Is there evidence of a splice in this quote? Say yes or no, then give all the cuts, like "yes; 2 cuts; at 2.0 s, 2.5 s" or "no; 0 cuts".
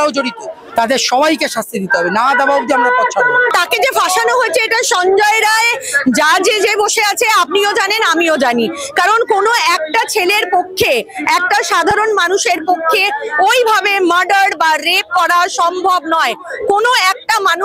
yes; 1 cut; at 3.5 s